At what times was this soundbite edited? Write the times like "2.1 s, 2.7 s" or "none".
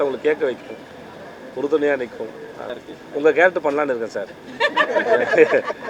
2.7 s